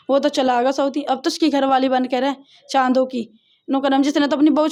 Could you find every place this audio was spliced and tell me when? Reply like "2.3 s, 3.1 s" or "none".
none